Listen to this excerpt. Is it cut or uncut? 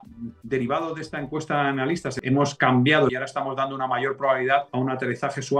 cut